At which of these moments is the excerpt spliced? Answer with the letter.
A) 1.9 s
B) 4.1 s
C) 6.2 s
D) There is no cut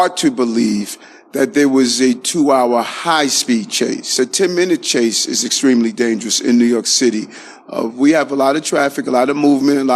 B